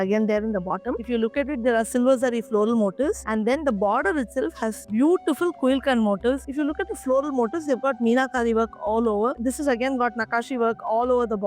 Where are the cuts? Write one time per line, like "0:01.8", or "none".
0:01.0
0:06.5
0:09.3